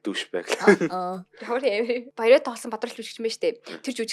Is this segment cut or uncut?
cut